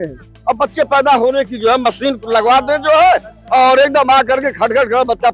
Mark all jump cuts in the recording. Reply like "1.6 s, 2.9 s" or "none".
none